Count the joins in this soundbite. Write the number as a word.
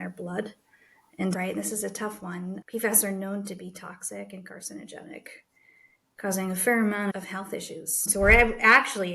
one